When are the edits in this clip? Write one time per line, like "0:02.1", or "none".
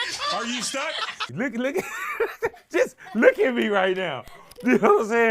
0:01.3